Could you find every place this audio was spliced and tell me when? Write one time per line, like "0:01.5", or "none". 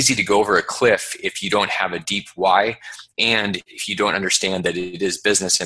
none